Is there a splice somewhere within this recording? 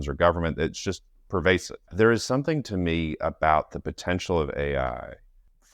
yes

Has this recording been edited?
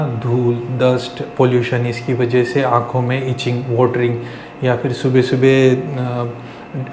no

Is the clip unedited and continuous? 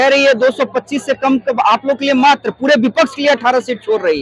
yes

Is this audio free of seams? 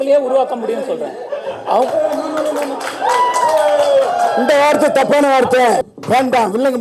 yes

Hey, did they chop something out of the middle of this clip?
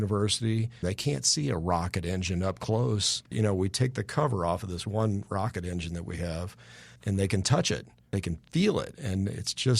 yes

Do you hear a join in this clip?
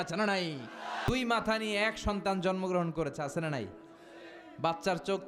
yes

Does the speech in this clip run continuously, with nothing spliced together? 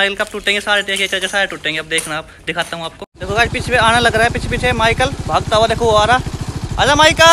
no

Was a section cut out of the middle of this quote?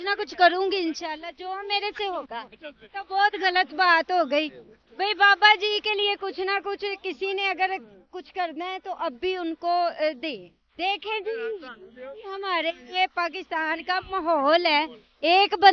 no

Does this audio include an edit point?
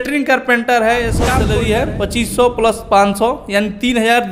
yes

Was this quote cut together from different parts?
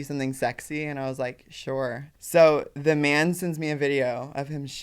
yes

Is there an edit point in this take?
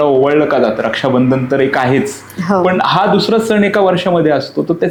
no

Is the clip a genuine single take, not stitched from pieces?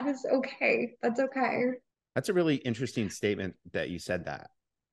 no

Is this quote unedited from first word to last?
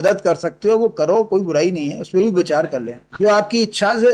yes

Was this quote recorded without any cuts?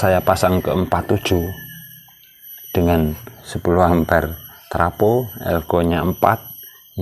no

